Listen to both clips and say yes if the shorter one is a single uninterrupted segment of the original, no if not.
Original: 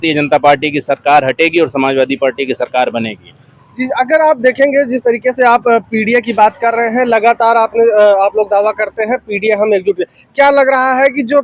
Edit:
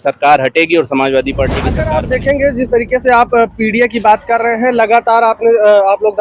no